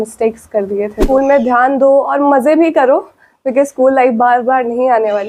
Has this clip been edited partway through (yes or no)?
yes